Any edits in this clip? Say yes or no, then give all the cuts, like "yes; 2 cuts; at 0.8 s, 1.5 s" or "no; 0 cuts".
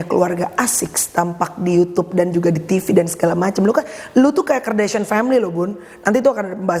no; 0 cuts